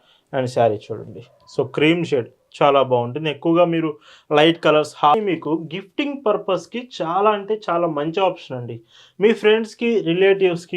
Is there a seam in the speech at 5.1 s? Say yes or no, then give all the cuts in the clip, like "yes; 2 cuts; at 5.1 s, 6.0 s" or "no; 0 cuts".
yes; 1 cut; at 5.1 s